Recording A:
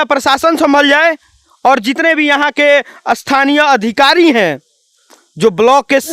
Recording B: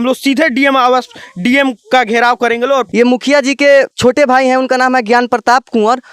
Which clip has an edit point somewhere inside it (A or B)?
B